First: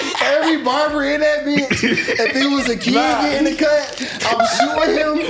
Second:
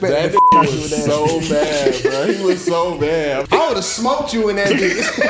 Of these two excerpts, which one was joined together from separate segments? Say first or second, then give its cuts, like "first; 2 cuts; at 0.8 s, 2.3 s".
second; 1 cut; at 3.4 s